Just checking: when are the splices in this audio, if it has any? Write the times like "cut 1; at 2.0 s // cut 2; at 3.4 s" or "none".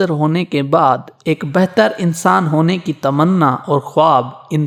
none